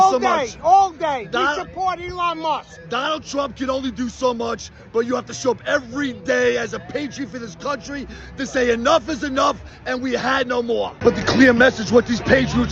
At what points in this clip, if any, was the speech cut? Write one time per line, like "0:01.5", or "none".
none